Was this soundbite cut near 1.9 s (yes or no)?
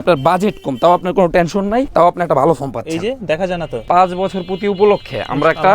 yes